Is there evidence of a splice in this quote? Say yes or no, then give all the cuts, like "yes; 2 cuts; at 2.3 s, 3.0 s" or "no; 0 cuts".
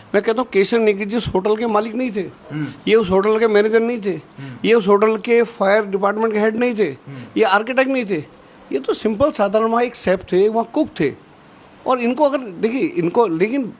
no; 0 cuts